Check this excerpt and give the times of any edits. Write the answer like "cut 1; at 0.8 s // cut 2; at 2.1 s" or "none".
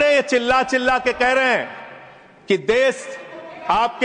none